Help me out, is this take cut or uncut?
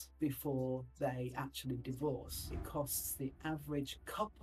cut